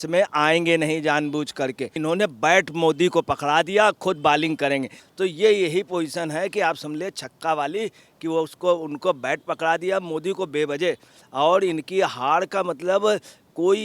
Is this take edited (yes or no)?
yes